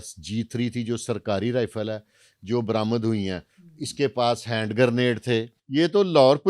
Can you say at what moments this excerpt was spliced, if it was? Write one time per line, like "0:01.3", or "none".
0:05.6